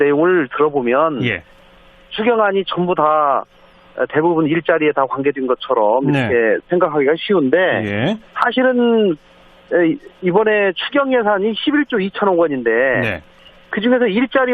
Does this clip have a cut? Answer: yes; 1 cut; at 9.0 s

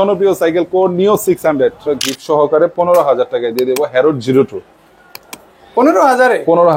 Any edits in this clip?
yes; 1 cut; at 1.9 s

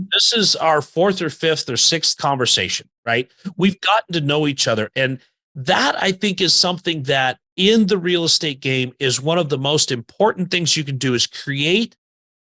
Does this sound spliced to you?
yes; 1 cut; at 7.4 s

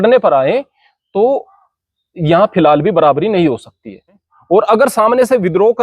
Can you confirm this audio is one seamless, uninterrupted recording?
no; 1 cut; at 4.1 s

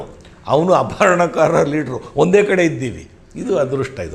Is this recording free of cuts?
yes; 0 cuts

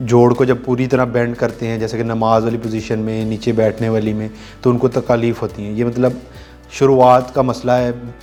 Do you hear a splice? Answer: no; 0 cuts

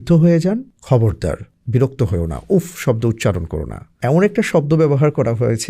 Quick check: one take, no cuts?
no; 2 cuts; at 1.1 s, 3.9 s

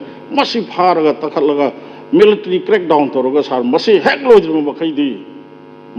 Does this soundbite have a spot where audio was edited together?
no; 0 cuts

